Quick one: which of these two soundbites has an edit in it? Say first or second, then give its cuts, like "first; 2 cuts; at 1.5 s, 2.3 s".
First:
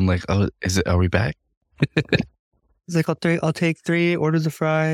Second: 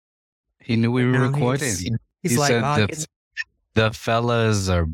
first; 1 cut; at 1.6 s